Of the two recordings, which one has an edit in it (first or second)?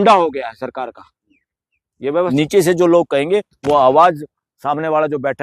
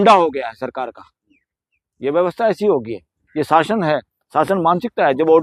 first